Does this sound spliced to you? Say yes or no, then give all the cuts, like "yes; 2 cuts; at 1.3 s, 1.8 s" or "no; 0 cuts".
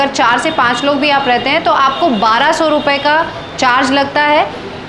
no; 0 cuts